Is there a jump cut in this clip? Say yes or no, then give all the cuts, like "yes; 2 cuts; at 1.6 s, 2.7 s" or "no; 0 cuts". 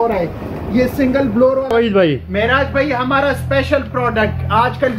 yes; 1 cut; at 1.7 s